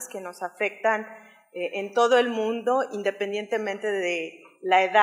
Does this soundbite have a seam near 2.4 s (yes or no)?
yes